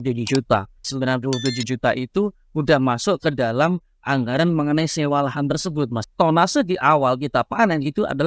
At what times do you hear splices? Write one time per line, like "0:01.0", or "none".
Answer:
0:00.9
0:06.0